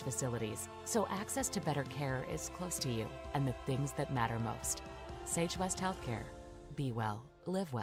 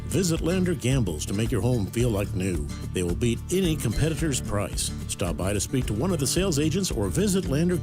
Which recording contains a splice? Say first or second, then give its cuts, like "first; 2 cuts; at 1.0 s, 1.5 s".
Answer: second; 1 cut; at 1.0 s